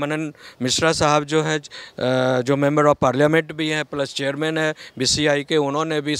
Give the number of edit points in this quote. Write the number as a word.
zero